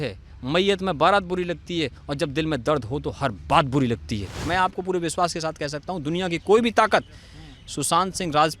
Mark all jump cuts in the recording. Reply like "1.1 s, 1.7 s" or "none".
4.5 s